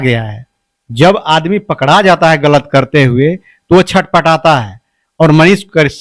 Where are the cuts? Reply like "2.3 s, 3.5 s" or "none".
none